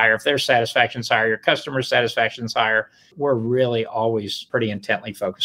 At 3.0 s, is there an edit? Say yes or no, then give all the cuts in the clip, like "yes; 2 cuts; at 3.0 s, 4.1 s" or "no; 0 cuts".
yes; 2 cuts; at 3.0 s, 4.4 s